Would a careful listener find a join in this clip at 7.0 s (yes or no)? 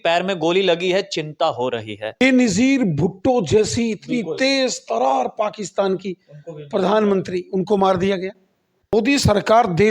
no